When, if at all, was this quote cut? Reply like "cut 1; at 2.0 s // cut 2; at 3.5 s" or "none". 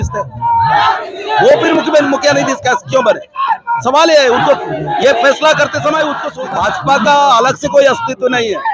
cut 1; at 6.3 s